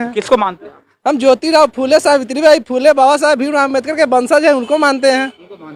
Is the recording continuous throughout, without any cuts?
yes; 0 cuts

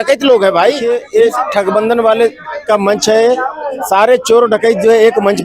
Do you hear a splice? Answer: yes; 1 cut; at 0.9 s

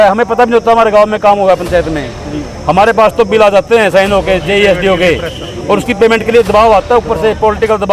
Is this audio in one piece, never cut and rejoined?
yes; 0 cuts

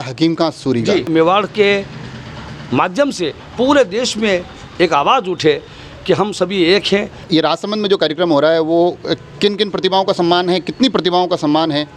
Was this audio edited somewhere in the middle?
yes; 2 cuts; at 1.1 s, 7.2 s

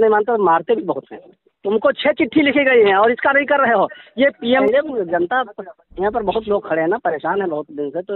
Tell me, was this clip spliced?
yes; 2 cuts; at 1.3 s, 4.6 s

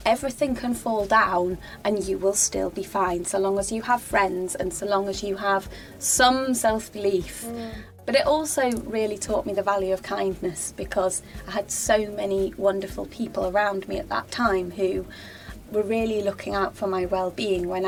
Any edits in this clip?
no; 0 cuts

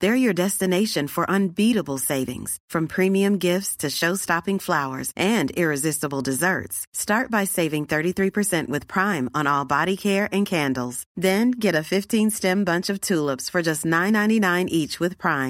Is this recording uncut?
yes; 0 cuts

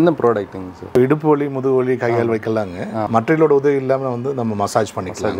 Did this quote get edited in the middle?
yes; 2 cuts; at 1.0 s, 3.1 s

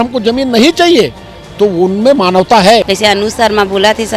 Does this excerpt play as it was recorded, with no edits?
no; 1 cut; at 2.9 s

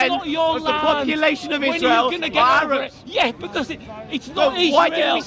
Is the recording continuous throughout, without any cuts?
yes; 0 cuts

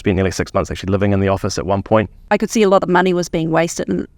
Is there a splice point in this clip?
yes; 1 cut; at 2.2 s

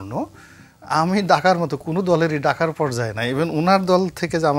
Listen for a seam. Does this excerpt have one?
no; 0 cuts

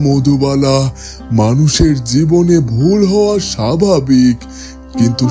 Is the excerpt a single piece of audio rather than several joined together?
yes; 0 cuts

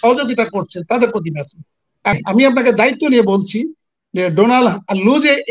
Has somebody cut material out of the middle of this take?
yes; 1 cut; at 2.1 s

